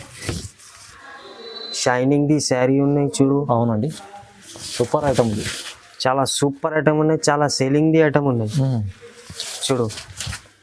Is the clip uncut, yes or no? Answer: yes